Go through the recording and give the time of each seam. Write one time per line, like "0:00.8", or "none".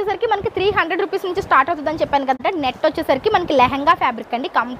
0:02.4